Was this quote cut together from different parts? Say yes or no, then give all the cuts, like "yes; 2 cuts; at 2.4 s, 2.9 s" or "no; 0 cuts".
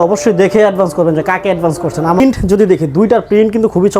yes; 1 cut; at 2.2 s